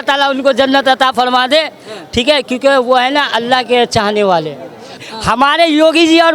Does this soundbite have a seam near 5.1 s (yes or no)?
yes